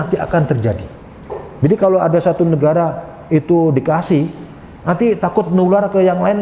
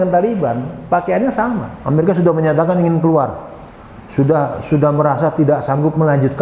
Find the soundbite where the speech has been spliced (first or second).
second